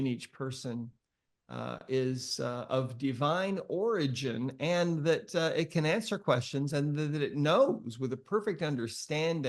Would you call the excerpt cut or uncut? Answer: uncut